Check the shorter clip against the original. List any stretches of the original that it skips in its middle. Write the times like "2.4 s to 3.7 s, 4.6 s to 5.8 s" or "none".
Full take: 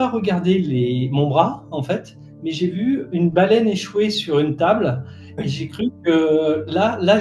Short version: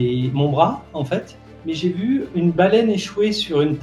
none